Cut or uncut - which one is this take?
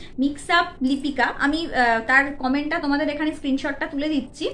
uncut